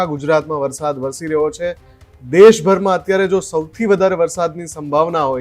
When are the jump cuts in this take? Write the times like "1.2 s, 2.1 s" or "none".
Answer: none